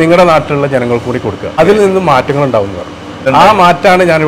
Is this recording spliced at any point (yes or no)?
yes